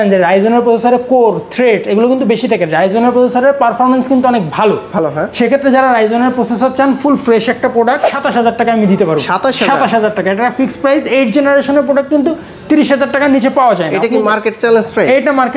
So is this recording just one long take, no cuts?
no; 1 cut; at 8.1 s

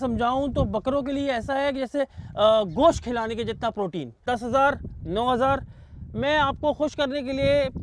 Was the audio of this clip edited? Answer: yes; 1 cut; at 4.2 s

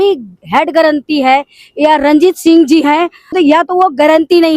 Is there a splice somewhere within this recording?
yes; 1 cut; at 3.3 s

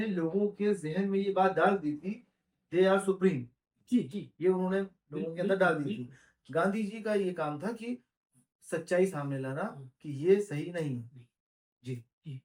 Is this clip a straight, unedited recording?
yes; 0 cuts

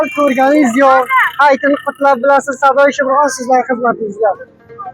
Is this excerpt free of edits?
yes; 0 cuts

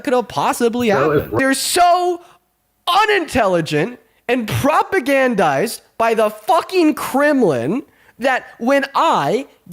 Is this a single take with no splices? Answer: no; 1 cut; at 1.4 s

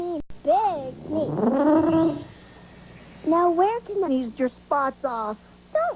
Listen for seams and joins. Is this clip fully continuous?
yes; 0 cuts

